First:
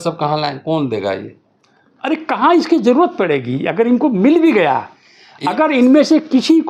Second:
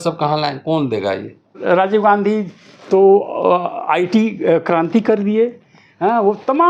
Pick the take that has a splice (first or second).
second